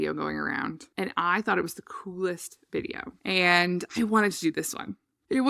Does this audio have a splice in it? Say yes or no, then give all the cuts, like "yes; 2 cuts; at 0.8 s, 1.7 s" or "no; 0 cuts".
yes; 1 cut; at 3.9 s